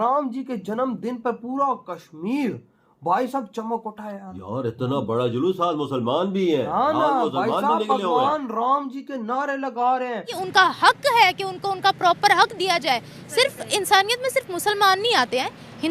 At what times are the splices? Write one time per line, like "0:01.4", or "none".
0:10.4